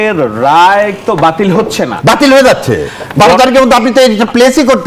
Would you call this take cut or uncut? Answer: cut